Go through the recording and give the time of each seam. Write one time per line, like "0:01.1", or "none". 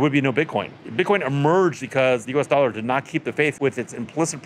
0:00.8
0:01.9
0:03.6